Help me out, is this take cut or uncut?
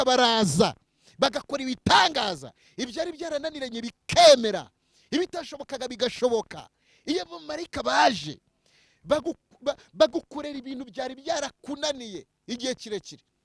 uncut